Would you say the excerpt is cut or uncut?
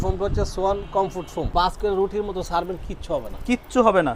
cut